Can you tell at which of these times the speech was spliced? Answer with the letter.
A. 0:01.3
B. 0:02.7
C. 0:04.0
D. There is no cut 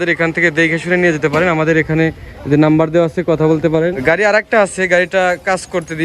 C